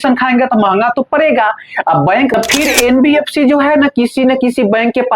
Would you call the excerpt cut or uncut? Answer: cut